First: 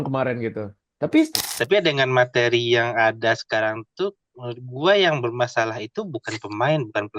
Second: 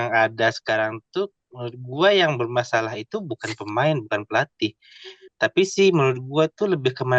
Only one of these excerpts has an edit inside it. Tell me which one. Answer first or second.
first